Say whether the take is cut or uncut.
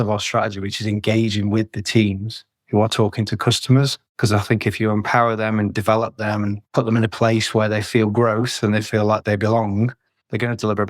cut